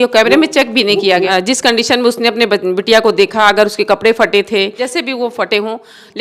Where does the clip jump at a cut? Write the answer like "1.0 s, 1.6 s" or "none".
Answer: 1.3 s, 4.8 s